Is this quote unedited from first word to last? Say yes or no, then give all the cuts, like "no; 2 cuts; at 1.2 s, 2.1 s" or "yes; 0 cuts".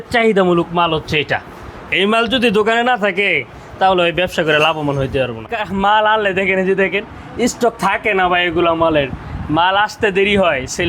no; 1 cut; at 5.5 s